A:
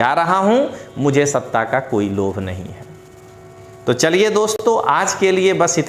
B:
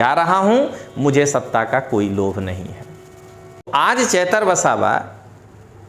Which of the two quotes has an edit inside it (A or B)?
B